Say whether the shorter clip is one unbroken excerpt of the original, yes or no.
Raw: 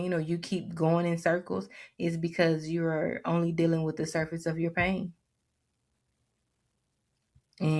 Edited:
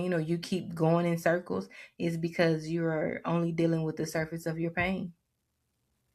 yes